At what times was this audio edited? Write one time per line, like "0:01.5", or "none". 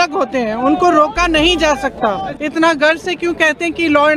0:02.3

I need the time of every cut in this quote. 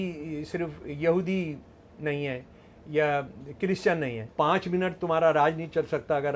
0:04.2

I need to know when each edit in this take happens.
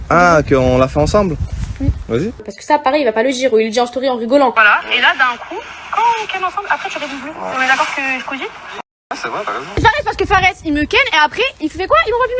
0:02.5
0:04.5
0:09.8

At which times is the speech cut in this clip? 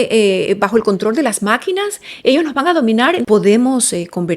0:03.2

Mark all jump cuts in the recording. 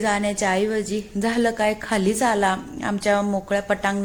none

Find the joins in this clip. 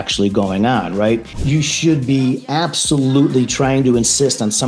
0:01.4

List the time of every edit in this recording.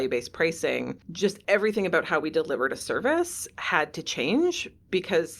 0:01.3

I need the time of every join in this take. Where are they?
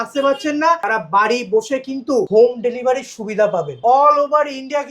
0:00.8
0:02.3
0:03.8

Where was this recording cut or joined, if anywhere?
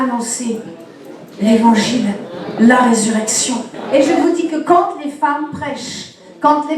0:03.7

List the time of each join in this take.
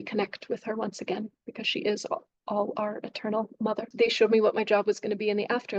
0:03.9

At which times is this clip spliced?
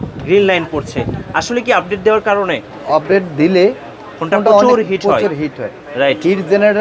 0:02.6

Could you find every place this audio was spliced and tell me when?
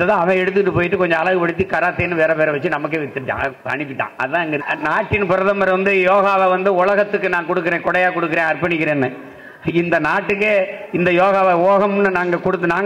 0:04.6

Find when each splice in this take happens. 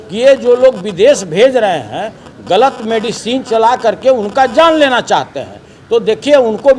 none

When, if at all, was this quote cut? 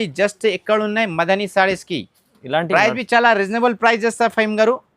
0:02.7

